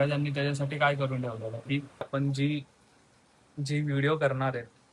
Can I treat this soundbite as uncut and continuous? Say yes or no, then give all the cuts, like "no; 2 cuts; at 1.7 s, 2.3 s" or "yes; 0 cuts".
no; 1 cut; at 2.1 s